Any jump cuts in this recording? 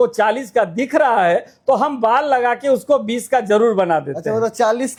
no; 0 cuts

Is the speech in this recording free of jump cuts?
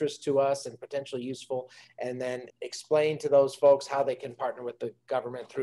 no; 1 cut; at 2.5 s

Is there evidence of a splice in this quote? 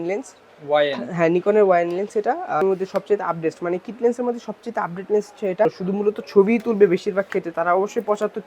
yes; 2 cuts; at 2.6 s, 5.7 s

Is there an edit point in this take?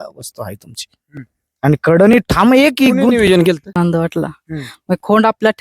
yes; 1 cut; at 3.8 s

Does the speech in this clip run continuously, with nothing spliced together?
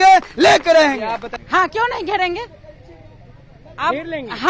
yes; 0 cuts

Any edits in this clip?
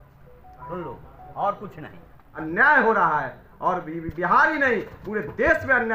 yes; 1 cut; at 2.3 s

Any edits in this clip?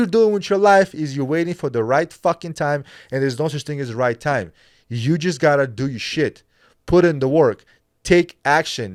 no; 0 cuts

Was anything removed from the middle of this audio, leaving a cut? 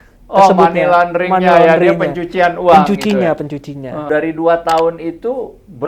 yes; 1 cut; at 4.0 s

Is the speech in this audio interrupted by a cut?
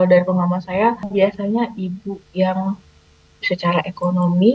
yes; 1 cut; at 1.1 s

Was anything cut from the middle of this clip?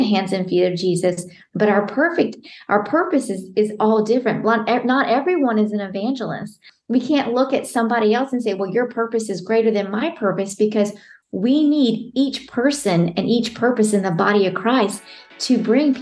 yes; 1 cut; at 6.7 s

